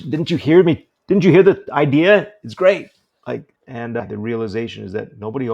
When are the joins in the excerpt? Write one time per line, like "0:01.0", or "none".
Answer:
0:03.6